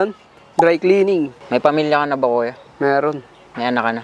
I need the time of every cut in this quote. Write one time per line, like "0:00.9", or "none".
0:01.4